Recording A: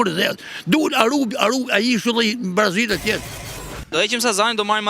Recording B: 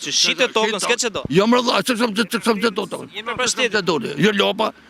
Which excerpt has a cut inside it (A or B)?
A